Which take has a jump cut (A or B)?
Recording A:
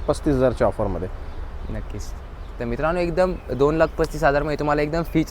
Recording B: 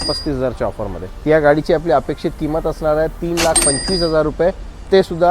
B